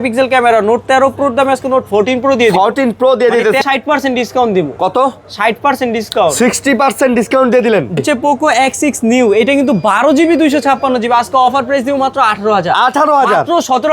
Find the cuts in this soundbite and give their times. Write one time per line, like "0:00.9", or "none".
0:03.6
0:08.0